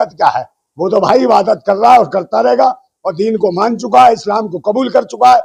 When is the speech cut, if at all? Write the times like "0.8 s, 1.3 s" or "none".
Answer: none

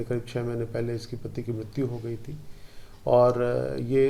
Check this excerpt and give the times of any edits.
none

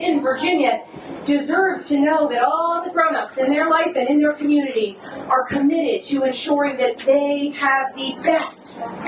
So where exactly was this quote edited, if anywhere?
none

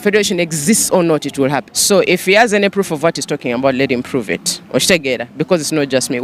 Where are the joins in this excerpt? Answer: 1.7 s

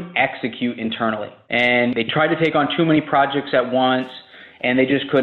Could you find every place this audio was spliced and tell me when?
1.3 s

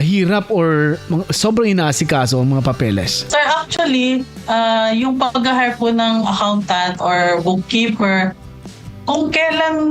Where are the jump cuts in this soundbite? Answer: 3.2 s

